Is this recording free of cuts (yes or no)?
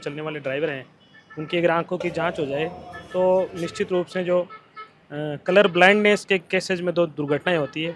yes